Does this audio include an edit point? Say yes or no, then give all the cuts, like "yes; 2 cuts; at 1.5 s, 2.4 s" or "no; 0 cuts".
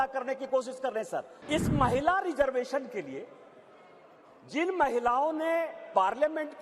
yes; 1 cut; at 1.4 s